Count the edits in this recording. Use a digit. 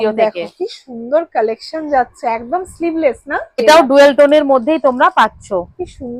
1